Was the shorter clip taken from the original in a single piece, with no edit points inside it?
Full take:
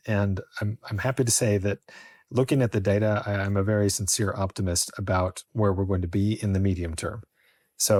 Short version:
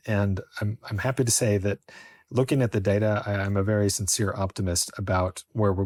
yes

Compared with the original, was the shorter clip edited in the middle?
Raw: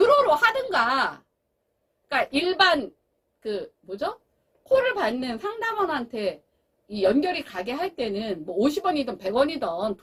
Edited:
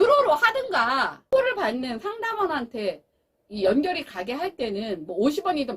yes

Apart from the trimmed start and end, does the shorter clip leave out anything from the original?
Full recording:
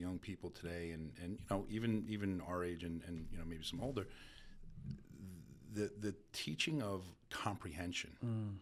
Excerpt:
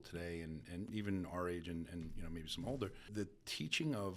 yes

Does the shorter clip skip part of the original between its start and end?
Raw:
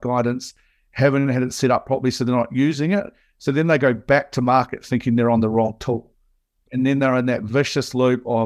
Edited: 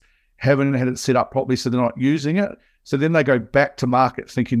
no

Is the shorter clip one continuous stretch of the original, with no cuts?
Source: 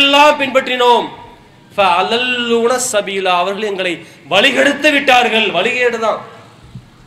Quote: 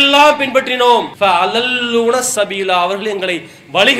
no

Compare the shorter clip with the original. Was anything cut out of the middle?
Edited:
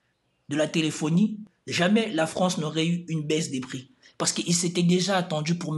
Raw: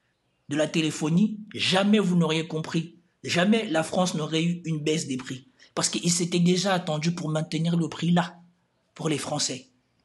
yes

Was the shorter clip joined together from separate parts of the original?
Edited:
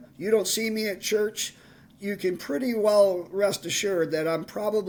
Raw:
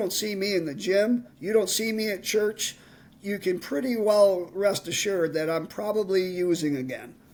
no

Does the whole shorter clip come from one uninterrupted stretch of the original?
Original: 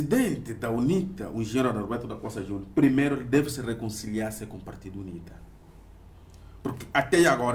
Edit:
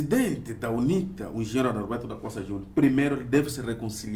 yes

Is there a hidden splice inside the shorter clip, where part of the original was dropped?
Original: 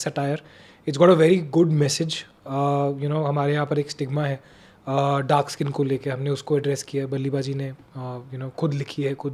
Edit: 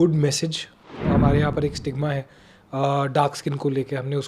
yes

